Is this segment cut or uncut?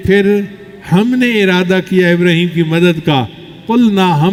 uncut